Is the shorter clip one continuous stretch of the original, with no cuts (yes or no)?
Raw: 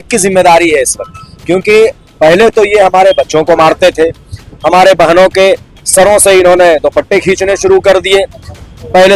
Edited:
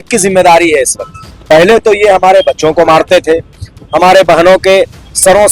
no